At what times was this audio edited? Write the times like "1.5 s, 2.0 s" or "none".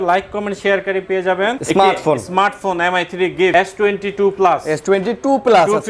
1.6 s, 3.5 s